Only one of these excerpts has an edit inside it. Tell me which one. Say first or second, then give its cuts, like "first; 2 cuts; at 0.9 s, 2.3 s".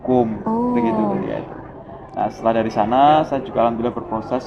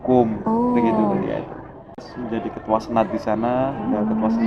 second; 1 cut; at 2.1 s